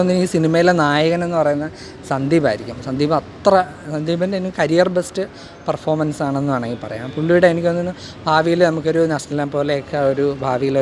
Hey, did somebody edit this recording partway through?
no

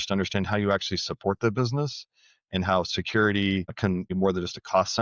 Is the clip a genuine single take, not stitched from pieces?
no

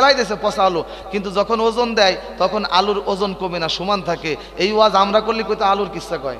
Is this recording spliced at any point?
no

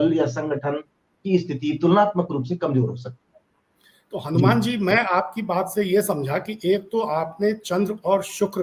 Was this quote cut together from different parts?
no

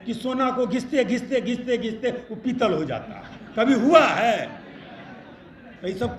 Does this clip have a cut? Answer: no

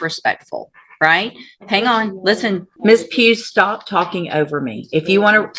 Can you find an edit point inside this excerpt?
yes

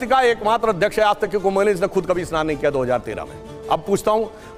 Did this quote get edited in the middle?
no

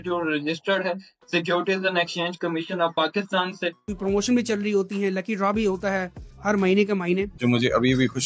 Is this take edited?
yes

